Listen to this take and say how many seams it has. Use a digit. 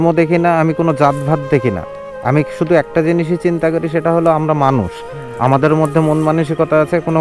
0